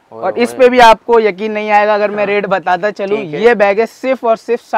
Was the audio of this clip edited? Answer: no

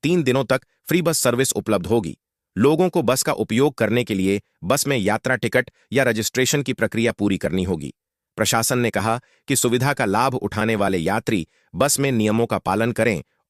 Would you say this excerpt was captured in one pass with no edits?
yes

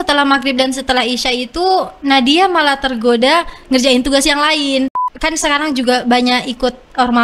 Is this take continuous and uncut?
no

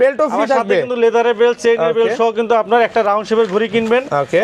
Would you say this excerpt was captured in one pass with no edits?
yes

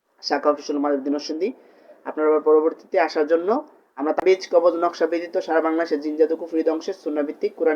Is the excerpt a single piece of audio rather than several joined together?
no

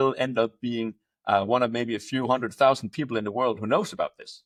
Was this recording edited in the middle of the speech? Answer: no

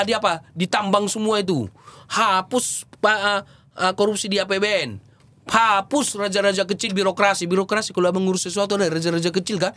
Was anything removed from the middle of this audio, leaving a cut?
no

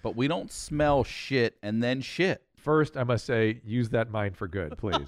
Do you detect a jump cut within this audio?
yes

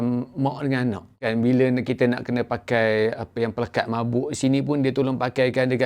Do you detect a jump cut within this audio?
yes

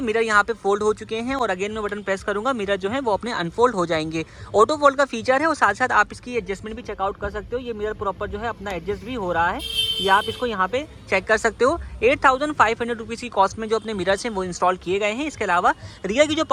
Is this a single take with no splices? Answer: yes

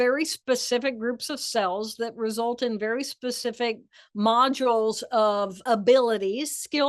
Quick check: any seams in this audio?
yes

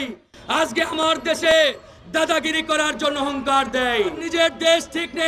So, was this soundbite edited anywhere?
yes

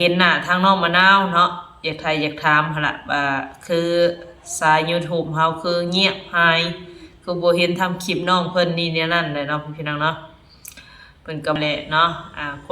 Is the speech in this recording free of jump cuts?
no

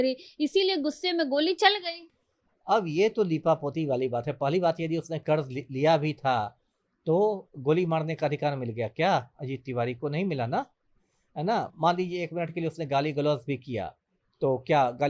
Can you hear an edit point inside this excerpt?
no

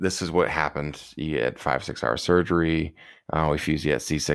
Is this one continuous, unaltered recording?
yes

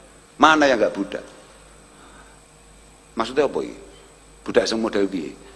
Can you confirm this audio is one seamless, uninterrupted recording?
yes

